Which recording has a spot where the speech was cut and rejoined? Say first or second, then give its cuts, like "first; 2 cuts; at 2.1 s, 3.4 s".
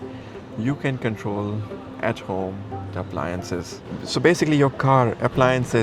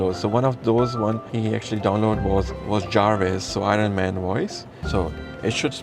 second; 3 cuts; at 1.3 s, 2.6 s, 4.7 s